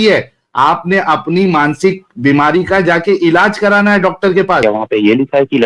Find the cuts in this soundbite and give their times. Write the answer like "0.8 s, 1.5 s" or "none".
4.6 s